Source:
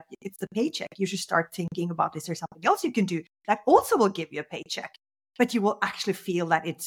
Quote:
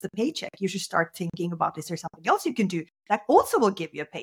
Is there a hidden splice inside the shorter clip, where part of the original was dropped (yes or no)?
no